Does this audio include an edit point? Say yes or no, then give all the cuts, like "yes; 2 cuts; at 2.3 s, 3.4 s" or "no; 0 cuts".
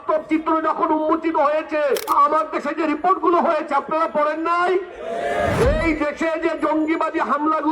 yes; 2 cuts; at 2.1 s, 5.5 s